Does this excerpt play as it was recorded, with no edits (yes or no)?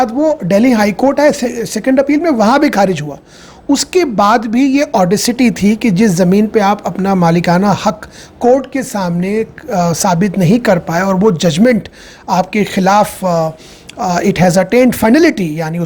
yes